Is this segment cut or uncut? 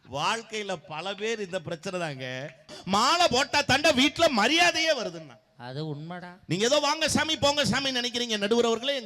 cut